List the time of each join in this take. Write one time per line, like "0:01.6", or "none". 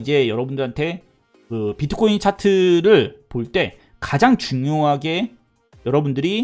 none

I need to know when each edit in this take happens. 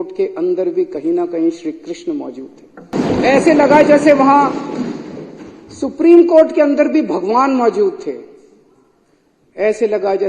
0:02.9

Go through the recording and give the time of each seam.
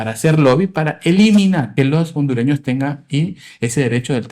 0:01.7

